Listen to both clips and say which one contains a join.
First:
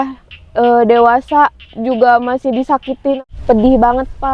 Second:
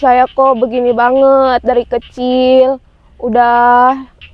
first; 1 cut; at 3.2 s

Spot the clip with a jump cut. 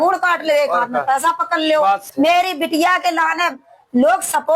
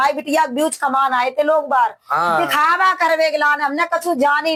first; 1 cut; at 2.1 s

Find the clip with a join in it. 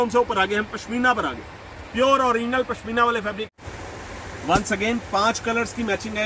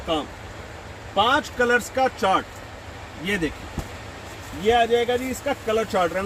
first; 1 cut; at 3.5 s

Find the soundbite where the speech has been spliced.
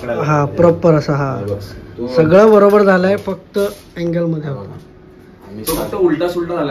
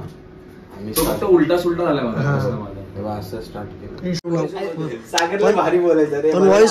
second; 1 cut; at 4.2 s

